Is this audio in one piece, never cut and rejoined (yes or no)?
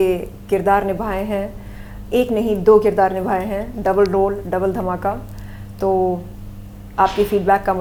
yes